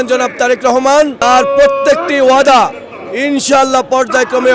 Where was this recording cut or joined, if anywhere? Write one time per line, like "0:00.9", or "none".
0:01.2